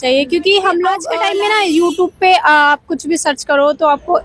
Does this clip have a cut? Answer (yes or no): yes